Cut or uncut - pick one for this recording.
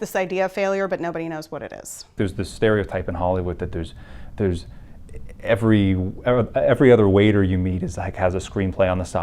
cut